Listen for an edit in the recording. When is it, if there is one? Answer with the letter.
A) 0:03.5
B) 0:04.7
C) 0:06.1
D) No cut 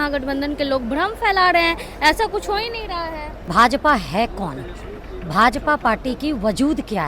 A